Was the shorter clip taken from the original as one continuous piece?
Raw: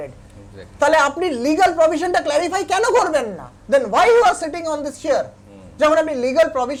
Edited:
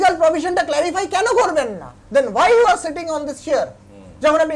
yes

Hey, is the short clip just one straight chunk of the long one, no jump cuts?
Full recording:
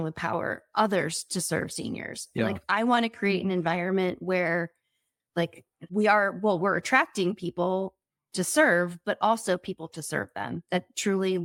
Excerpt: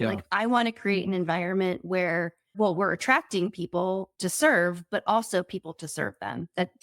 no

